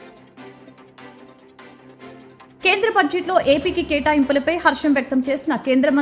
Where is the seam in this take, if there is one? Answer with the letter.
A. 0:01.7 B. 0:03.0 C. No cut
A